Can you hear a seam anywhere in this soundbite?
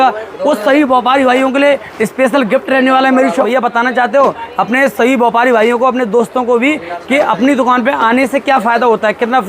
yes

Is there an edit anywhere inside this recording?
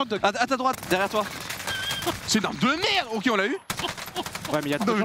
no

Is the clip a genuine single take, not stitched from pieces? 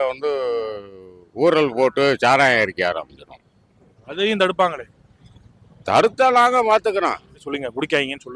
no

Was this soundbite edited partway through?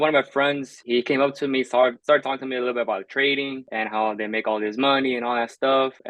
no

